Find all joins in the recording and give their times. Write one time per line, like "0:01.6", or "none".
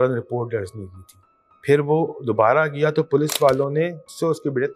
none